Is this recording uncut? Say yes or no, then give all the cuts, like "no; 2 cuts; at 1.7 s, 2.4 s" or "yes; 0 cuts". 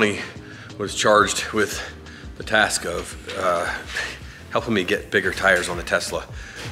yes; 0 cuts